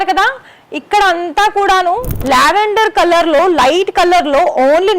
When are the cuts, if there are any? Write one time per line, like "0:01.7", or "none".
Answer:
0:02.1